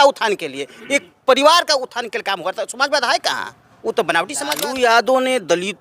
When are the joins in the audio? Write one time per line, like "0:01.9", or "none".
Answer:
0:04.4